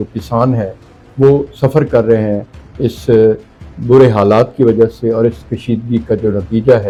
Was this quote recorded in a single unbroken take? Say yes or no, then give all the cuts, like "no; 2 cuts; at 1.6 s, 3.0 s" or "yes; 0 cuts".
yes; 0 cuts